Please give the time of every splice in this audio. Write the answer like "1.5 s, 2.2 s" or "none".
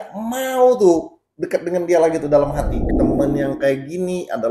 2.8 s